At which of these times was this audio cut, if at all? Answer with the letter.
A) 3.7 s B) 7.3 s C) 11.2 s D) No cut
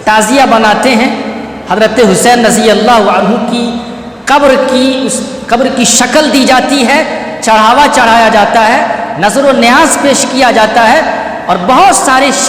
D